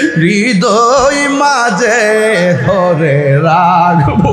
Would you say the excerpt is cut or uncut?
uncut